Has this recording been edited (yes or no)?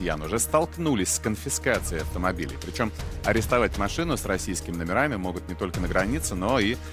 no